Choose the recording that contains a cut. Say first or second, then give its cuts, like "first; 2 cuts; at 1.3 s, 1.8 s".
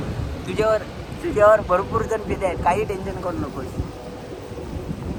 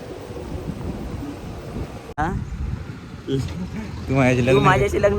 second; 1 cut; at 2.0 s